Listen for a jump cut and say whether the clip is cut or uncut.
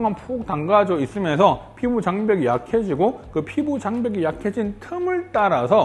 uncut